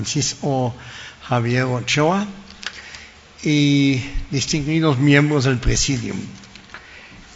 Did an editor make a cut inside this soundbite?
no; 0 cuts

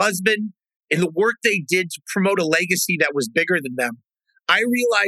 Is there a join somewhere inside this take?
no; 0 cuts

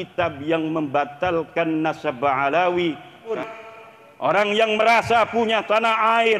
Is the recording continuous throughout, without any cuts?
no; 1 cut; at 3.4 s

